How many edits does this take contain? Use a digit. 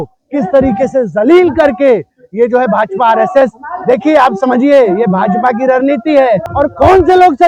1